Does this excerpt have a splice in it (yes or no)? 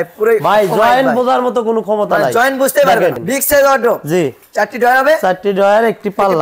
yes